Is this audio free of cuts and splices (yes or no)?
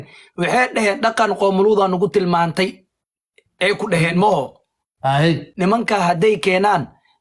no